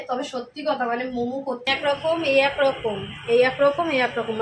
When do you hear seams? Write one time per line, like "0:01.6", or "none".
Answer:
0:01.7